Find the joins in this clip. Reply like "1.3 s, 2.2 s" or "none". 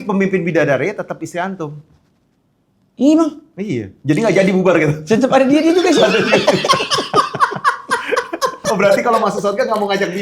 8.6 s